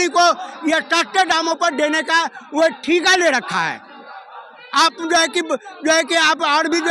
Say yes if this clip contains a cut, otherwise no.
no